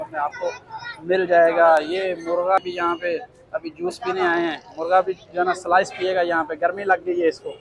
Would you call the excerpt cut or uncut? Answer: cut